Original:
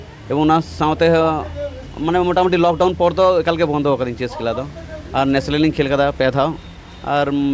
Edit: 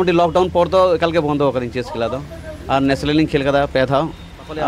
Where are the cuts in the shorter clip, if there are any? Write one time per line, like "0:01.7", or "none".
none